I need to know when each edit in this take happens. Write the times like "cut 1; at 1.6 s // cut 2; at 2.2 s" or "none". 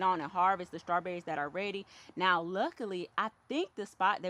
none